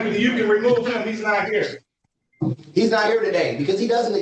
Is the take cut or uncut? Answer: uncut